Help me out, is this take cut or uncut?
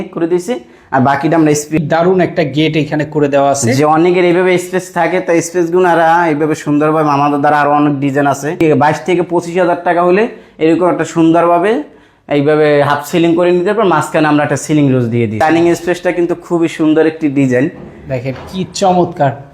cut